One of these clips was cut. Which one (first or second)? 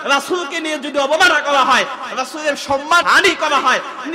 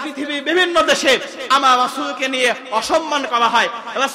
first